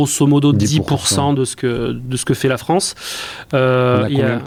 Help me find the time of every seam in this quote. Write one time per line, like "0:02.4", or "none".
none